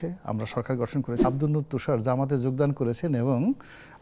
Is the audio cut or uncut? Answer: cut